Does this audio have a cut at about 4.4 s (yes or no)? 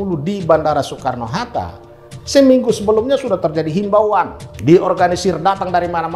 yes